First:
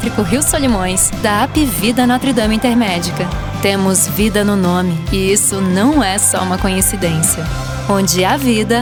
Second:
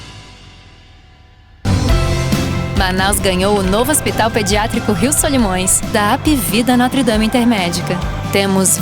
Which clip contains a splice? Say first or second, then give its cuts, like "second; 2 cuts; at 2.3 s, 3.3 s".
second; 1 cut; at 1.6 s